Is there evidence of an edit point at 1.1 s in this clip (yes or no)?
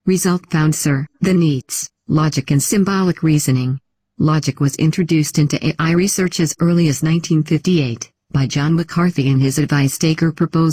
yes